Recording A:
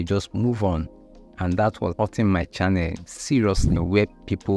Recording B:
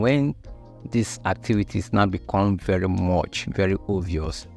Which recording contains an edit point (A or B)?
A